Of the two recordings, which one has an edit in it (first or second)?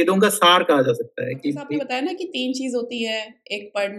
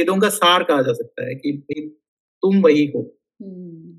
first